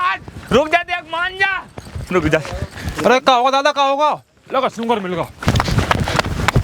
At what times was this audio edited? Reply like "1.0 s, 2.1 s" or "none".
2.9 s, 5.4 s